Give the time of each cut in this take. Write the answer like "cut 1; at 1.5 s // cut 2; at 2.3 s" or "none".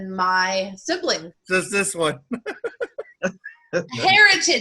cut 1; at 1.3 s